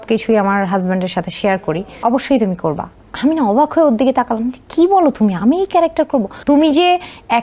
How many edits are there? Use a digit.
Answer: 2